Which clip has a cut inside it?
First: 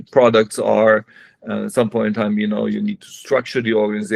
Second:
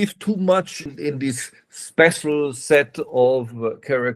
second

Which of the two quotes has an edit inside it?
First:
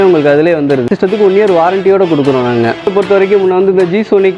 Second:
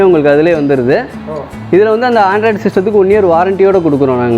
first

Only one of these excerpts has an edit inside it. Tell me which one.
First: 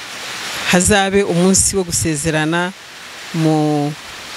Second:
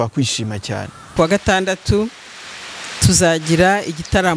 second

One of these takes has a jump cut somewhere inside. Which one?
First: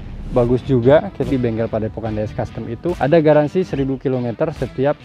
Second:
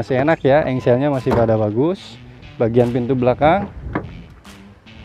first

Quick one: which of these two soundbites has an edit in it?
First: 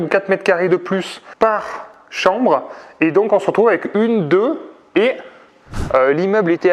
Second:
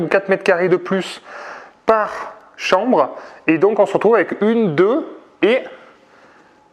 first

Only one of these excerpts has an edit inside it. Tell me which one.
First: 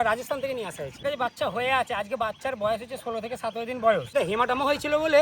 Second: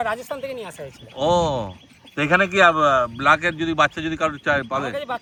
first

